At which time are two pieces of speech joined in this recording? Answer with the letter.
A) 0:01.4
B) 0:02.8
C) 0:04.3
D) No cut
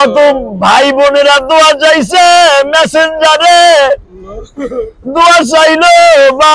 D